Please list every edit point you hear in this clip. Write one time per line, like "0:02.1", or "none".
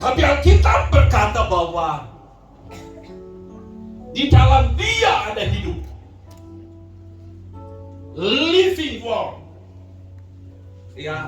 none

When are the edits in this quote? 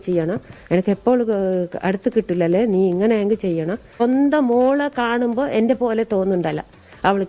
0:04.0

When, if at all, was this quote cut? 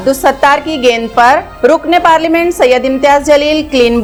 none

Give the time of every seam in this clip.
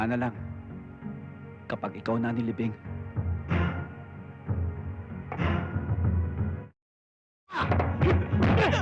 none

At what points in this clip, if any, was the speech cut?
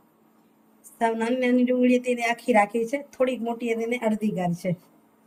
none

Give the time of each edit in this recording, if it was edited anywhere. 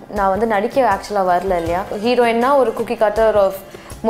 0:01.9

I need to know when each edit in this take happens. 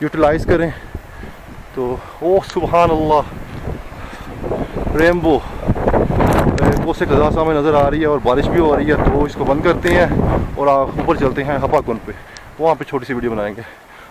none

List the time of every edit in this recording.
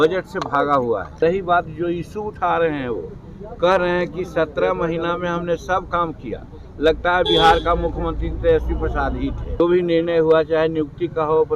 0:01.2
0:09.6

